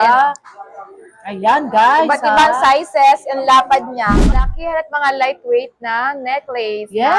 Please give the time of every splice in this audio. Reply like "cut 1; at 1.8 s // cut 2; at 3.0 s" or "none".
cut 1; at 4.3 s